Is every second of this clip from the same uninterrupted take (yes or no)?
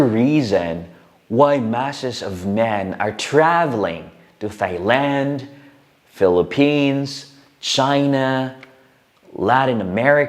yes